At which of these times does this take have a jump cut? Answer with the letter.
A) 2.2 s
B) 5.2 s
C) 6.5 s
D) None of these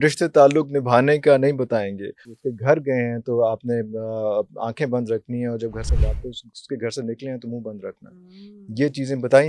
A